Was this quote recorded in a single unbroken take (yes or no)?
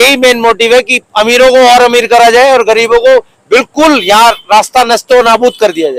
yes